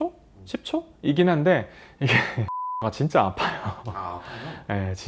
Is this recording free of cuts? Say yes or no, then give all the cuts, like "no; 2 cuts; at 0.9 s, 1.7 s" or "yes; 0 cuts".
no; 1 cut; at 2.8 s